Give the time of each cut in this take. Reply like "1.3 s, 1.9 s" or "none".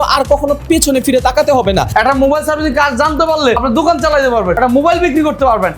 1.9 s, 3.6 s, 4.6 s